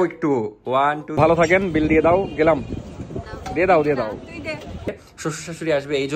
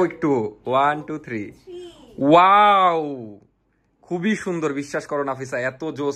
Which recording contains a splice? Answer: first; 2 cuts; at 1.2 s, 4.9 s

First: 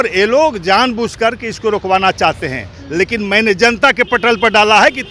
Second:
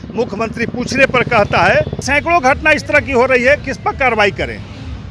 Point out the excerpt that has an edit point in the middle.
second; 1 cut; at 2.0 s

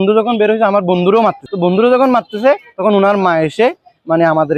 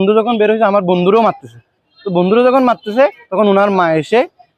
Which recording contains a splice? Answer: first; 1 cut; at 1.5 s

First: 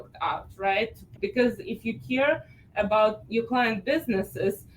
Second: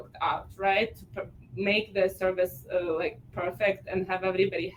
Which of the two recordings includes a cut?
first; 1 cut; at 1.0 s

